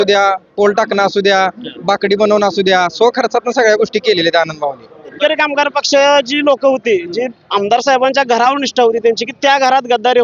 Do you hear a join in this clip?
yes; 1 cut; at 5.2 s

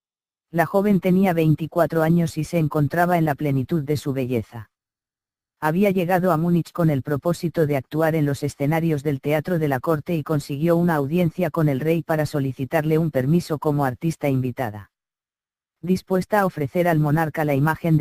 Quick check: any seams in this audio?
yes; 1 cut; at 4.0 s

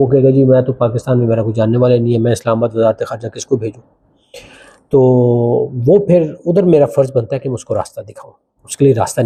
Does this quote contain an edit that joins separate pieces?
no; 0 cuts

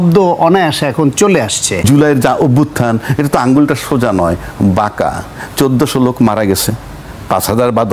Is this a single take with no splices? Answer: no; 1 cut; at 1.8 s

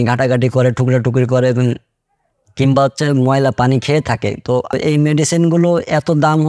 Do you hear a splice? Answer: yes; 1 cut; at 4.7 s

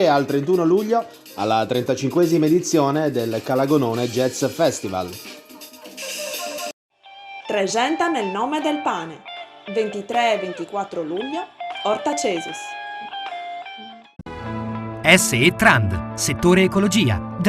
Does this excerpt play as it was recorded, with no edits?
no; 2 cuts; at 6.7 s, 14.2 s

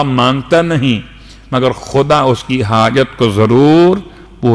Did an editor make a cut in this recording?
no; 0 cuts

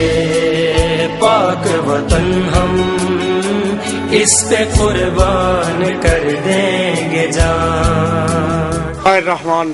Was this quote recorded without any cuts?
yes; 0 cuts

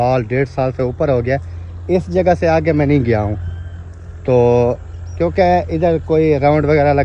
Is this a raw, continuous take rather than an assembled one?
yes; 0 cuts

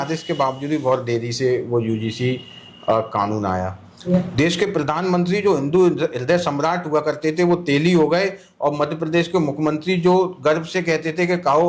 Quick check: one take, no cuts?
no; 1 cut; at 3.9 s

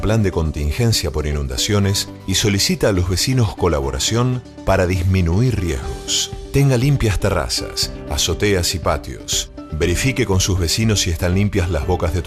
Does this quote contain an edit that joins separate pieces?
no; 0 cuts

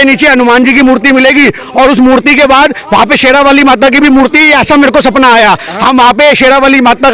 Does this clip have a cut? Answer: no; 0 cuts

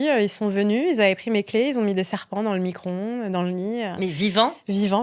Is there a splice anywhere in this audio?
no; 0 cuts

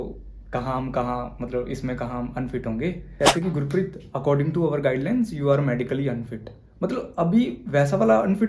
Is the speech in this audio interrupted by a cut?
yes; 1 cut; at 3.1 s

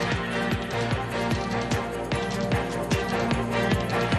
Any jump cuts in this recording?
yes; 1 cut; at 1.6 s

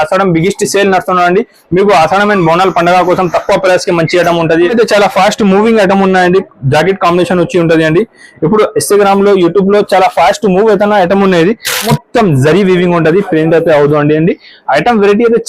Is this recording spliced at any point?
yes; 2 cuts; at 4.7 s, 11.9 s

